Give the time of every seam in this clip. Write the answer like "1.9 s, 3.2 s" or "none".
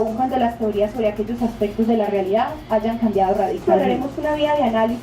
3.6 s